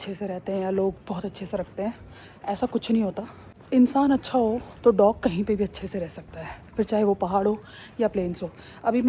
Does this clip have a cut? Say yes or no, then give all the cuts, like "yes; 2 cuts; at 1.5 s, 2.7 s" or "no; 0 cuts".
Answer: no; 0 cuts